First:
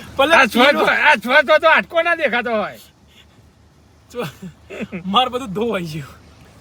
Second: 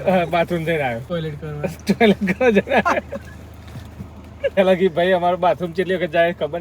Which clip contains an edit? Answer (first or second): second